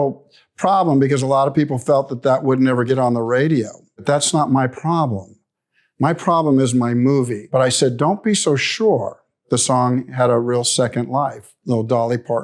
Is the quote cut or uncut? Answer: cut